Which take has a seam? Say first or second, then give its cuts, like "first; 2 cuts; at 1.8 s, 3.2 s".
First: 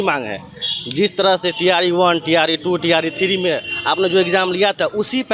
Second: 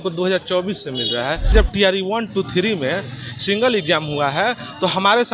second; 1 cut; at 1.5 s